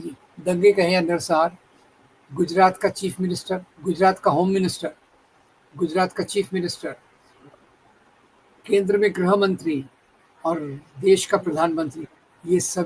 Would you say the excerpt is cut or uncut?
uncut